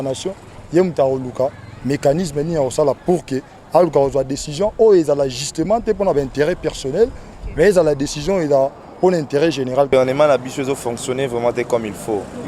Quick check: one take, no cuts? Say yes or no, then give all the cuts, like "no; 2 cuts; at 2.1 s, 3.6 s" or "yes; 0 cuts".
no; 1 cut; at 9.9 s